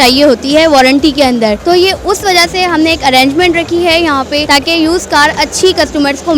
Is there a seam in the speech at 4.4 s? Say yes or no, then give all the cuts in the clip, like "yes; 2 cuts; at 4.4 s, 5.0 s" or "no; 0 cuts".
yes; 2 cuts; at 1.6 s, 4.4 s